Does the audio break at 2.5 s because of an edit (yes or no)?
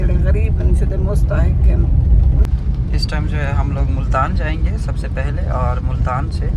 yes